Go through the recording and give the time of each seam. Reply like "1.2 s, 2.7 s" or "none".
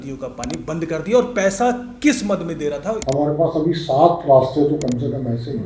3.0 s